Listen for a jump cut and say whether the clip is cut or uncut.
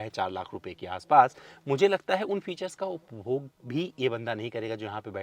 uncut